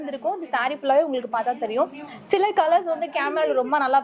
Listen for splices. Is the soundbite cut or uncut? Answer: uncut